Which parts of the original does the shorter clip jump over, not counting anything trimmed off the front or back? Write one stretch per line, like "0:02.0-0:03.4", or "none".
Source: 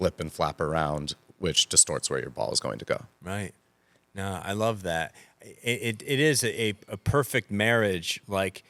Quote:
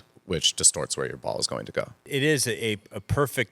0:03.2-0:06.0